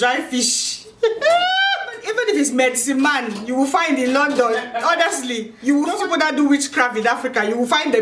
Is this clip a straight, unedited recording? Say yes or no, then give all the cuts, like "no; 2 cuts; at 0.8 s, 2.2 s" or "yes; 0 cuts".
no; 2 cuts; at 2.0 s, 5.9 s